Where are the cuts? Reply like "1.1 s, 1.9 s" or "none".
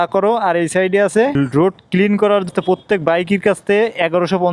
1.4 s, 2.5 s